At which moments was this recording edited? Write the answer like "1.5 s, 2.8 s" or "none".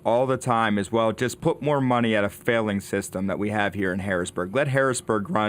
1.4 s